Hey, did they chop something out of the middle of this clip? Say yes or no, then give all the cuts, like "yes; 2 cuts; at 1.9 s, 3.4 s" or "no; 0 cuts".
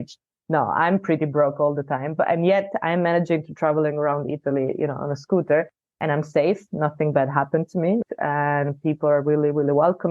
yes; 1 cut; at 8.0 s